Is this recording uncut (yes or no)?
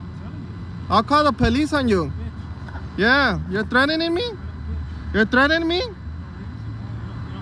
yes